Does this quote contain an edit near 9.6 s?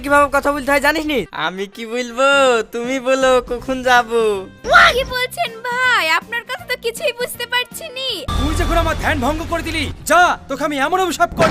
no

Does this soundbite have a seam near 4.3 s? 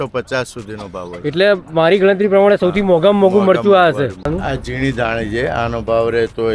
yes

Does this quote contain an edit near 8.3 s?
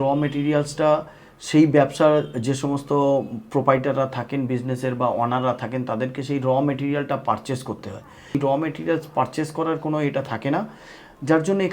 yes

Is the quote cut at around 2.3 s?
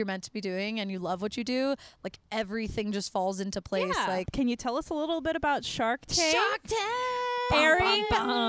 no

